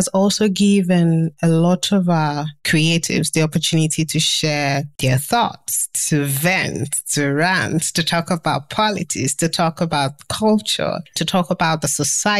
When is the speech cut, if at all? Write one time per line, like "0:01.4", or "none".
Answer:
none